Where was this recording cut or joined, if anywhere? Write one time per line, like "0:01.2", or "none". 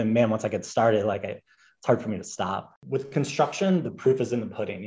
0:02.7